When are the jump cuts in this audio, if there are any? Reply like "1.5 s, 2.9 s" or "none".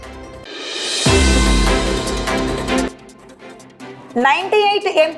none